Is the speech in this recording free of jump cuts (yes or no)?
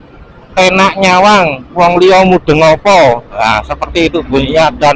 yes